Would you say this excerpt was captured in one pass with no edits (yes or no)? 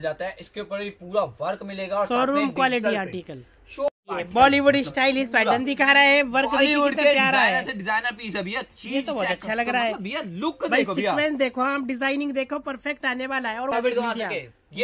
no